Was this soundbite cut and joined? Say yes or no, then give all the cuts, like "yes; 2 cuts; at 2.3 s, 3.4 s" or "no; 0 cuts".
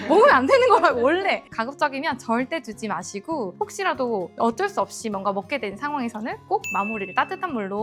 no; 0 cuts